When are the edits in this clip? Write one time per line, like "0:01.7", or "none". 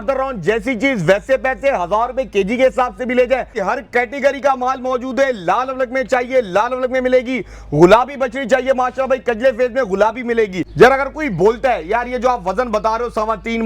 0:03.6
0:10.6

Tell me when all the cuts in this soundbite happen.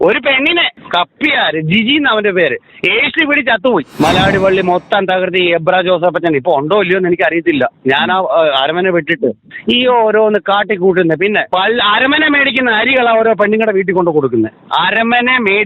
0:03.9

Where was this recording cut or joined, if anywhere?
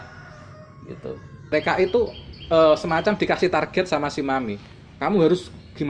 0:01.4

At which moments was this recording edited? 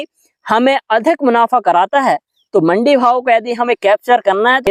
none

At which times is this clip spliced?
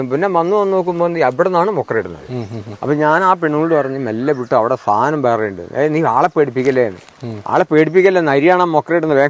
none

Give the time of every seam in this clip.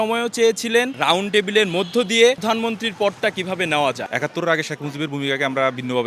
0:00.9
0:02.4
0:04.1

